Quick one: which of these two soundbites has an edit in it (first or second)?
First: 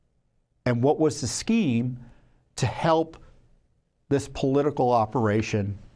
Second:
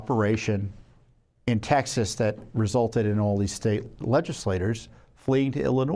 second